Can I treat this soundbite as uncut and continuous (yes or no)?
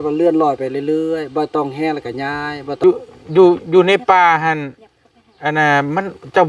no